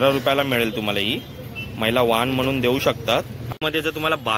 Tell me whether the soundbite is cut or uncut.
cut